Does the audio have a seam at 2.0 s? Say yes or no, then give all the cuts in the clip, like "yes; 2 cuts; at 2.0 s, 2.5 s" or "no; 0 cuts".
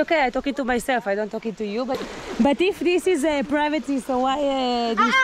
yes; 1 cut; at 2.0 s